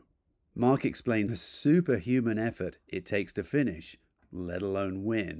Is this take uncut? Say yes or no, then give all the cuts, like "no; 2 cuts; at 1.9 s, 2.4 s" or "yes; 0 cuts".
no; 1 cut; at 1.3 s